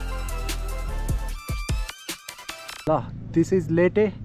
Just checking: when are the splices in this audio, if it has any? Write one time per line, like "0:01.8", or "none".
0:03.2

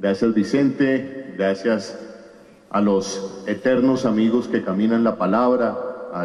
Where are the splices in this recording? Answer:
0:02.1

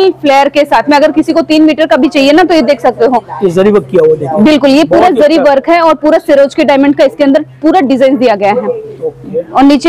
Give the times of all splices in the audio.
none

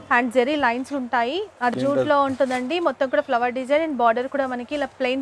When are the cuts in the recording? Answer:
0:01.7

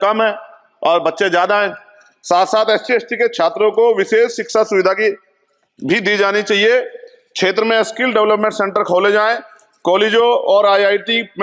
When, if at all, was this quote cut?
none

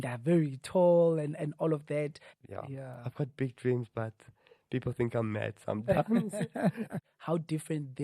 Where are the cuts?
0:02.3
0:07.1

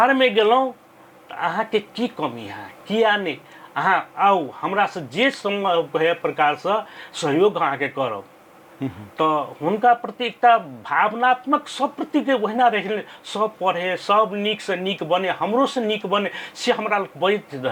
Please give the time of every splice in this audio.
none

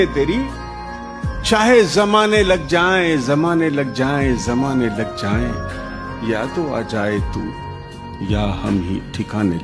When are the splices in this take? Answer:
none

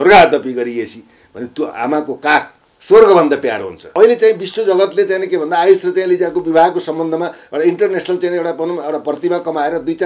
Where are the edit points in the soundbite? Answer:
0:03.8

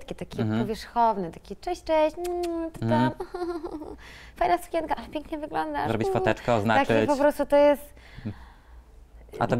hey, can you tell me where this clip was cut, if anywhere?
none

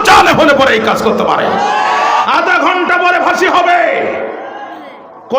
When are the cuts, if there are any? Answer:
0:02.2

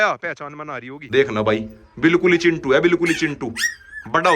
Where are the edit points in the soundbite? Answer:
0:01.0

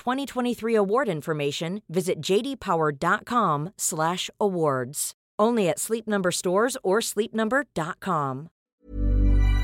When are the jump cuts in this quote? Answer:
0:08.7

